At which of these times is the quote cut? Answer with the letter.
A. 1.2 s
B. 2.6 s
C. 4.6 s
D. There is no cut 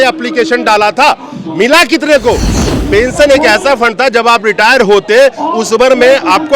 B